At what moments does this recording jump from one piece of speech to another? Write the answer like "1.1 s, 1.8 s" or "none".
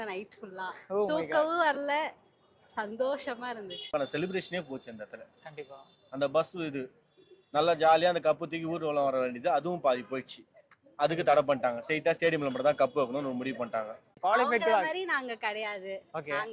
3.9 s, 14.0 s